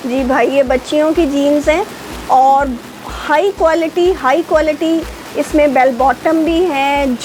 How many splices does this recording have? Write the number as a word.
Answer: zero